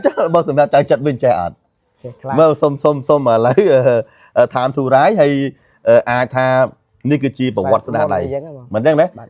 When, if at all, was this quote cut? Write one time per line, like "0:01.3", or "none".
none

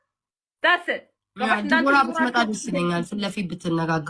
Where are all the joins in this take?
none

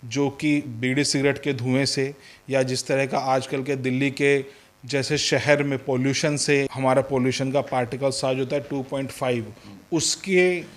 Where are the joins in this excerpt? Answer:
0:06.7

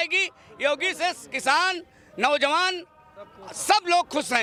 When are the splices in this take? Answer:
none

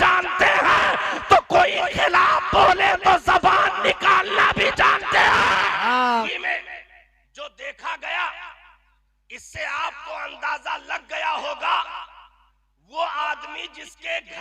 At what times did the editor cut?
0:06.3

